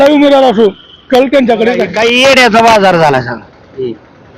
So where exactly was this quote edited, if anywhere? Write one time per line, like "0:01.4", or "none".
0:01.9